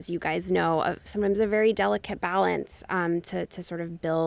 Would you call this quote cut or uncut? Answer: uncut